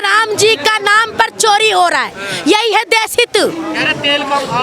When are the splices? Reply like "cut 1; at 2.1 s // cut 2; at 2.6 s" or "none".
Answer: none